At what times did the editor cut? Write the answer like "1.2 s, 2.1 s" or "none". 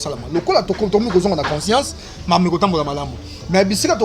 none